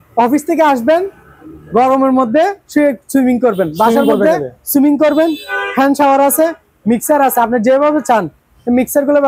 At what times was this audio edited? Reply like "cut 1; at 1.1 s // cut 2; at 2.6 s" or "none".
none